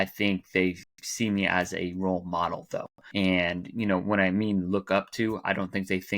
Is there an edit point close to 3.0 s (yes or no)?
yes